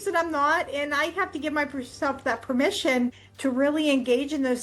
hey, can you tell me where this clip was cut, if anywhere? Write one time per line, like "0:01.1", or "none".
0:03.3

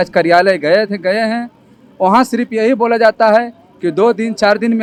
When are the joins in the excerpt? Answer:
none

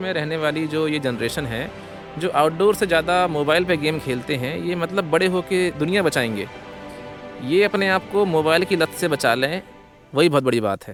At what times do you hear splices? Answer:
none

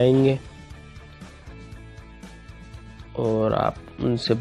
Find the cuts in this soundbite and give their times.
0:00.9
0:03.1

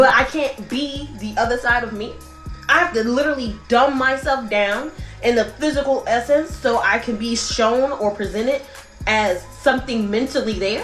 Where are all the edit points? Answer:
0:08.2

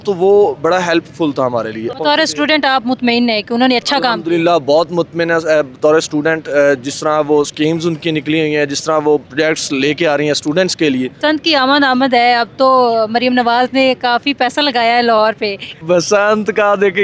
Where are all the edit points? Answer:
0:02.0
0:09.2
0:11.1
0:15.7

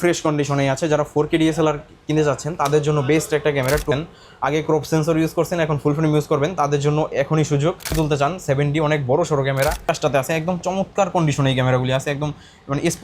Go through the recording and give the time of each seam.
0:03.9
0:07.9
0:09.8

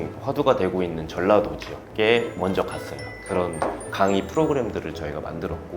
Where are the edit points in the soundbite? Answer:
0:03.1

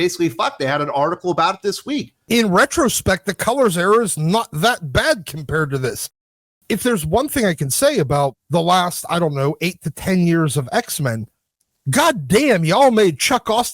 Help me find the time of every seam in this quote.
0:02.1

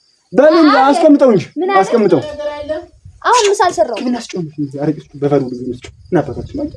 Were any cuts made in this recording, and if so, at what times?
none

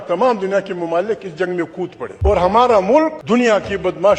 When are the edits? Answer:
0:02.1
0:03.2

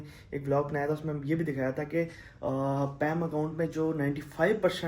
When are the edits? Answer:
none

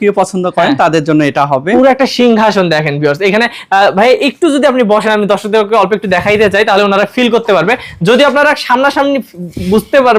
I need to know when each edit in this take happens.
none

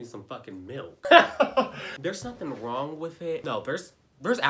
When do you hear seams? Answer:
0:01.0
0:01.8
0:03.4

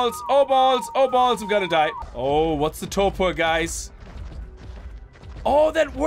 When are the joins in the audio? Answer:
0:02.1

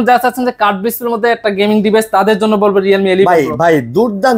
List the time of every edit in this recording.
none

